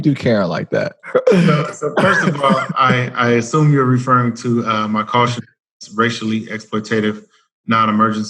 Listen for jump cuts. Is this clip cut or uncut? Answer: cut